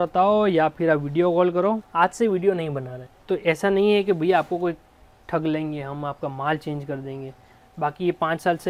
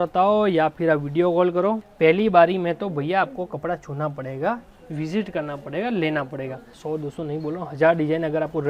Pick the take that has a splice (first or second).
second